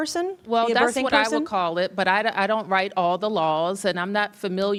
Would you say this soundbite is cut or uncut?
uncut